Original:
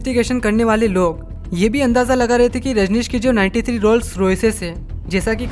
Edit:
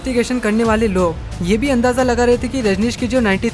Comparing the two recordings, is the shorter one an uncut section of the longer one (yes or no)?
no